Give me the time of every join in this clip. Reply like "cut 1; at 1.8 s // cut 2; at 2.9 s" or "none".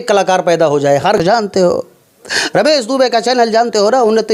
cut 1; at 1.2 s